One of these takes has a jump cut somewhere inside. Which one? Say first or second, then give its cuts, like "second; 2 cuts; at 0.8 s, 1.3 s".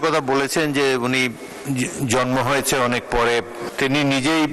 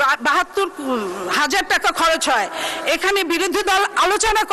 first; 2 cuts; at 1.5 s, 3.6 s